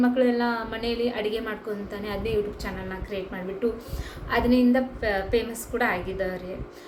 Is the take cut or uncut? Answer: uncut